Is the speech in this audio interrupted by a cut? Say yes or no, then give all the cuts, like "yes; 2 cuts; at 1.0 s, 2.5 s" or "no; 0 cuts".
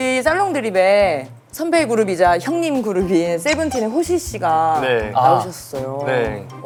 no; 0 cuts